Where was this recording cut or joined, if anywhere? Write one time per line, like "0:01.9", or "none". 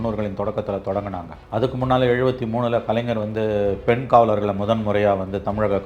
0:01.3